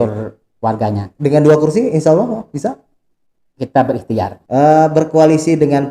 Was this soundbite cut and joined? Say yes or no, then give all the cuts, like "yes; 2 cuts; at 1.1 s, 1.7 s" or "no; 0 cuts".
yes; 1 cut; at 4.4 s